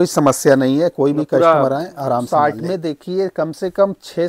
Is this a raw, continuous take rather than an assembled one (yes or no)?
no